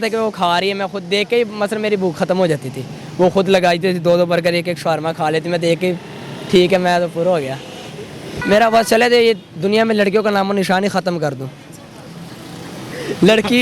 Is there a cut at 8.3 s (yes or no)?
yes